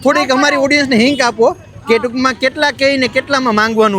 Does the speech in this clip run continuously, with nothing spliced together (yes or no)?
yes